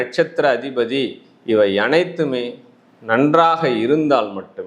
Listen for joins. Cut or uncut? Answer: uncut